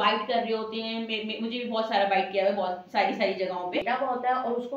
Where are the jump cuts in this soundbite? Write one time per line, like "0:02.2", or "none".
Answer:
0:03.8